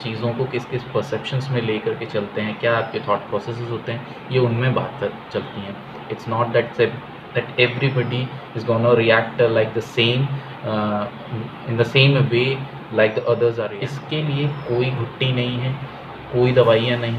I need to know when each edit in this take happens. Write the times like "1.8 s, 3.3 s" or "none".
13.7 s